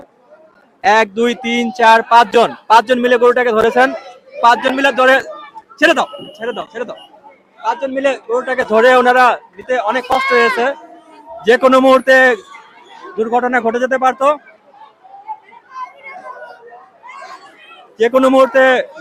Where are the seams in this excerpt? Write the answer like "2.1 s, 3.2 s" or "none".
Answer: none